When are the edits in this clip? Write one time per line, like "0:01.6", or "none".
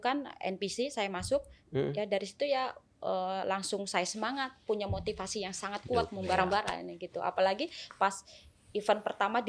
none